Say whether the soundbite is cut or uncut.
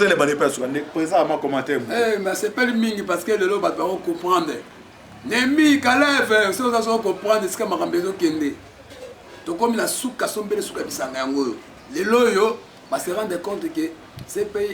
uncut